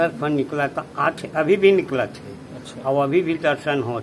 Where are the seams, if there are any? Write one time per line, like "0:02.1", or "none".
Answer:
none